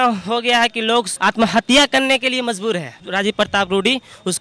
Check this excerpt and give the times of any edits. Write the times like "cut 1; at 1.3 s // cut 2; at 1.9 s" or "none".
cut 1; at 1.1 s // cut 2; at 3.0 s